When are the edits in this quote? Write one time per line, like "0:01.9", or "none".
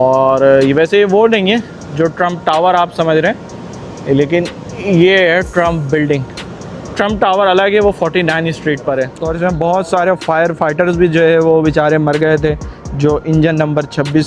0:09.2